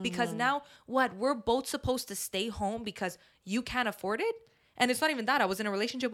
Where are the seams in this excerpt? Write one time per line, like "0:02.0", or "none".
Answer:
none

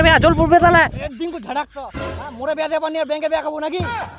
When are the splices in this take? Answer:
0:01.0

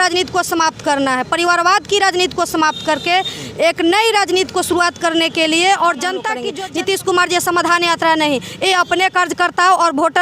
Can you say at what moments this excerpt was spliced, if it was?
0:06.4

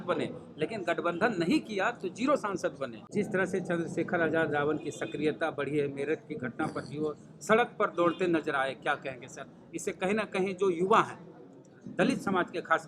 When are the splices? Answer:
0:03.0

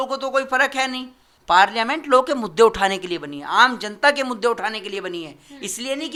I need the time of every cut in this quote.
none

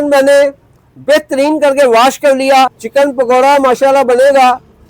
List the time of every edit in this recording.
0:02.8

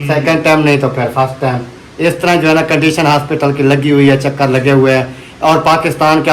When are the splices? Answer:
none

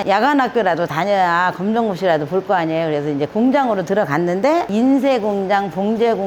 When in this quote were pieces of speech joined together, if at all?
0:04.7

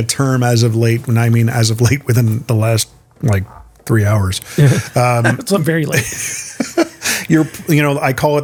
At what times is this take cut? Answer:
none

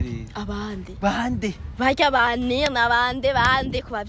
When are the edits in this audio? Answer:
none

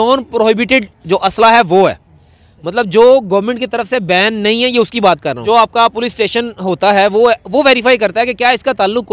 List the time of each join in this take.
0:05.4

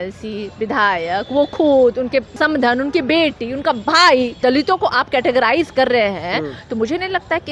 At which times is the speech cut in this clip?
0:02.4
0:04.4

